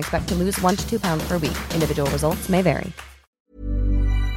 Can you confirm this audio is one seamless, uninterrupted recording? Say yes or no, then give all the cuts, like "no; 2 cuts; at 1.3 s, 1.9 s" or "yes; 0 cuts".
no; 1 cut; at 3.4 s